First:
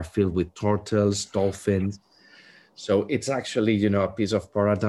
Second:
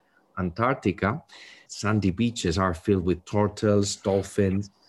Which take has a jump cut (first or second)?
second